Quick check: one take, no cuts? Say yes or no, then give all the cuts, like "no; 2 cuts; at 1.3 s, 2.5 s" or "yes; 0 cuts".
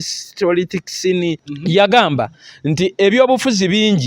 no; 1 cut; at 1.5 s